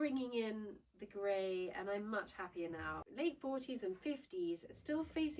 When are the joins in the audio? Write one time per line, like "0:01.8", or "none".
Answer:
0:03.0